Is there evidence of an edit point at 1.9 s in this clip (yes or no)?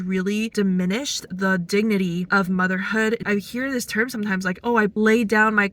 no